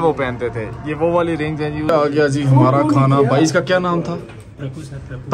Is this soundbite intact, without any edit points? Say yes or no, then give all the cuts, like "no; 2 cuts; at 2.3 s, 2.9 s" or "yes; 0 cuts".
no; 1 cut; at 1.9 s